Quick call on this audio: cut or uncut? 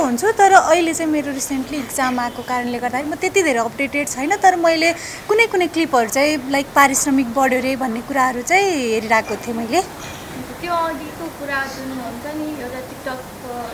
uncut